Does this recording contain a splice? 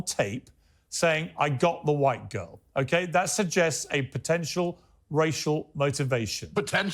no; 0 cuts

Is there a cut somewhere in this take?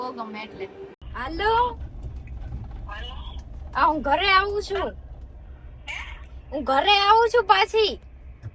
yes; 1 cut; at 1.0 s

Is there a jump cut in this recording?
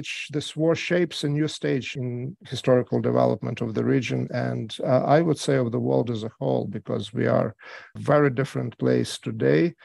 yes; 2 cuts; at 1.9 s, 7.9 s

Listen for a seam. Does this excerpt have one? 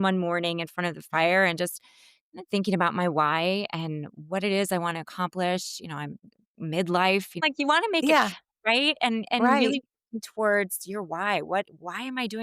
yes; 1 cut; at 7.4 s

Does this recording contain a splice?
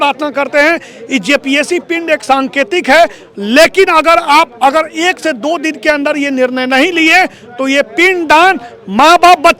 no; 0 cuts

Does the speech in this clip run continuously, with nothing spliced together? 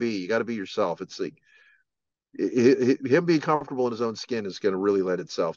yes; 0 cuts

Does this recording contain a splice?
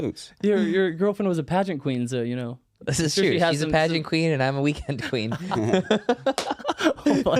no; 0 cuts

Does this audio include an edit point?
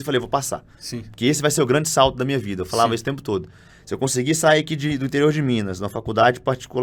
no; 0 cuts

